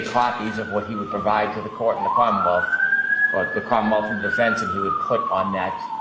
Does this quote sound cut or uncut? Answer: uncut